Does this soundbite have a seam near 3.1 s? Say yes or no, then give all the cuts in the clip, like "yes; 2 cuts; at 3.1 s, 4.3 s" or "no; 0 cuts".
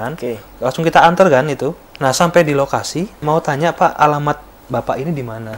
yes; 2 cuts; at 1.9 s, 3.1 s